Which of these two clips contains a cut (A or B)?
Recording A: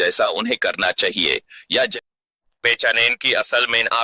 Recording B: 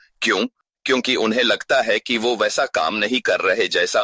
A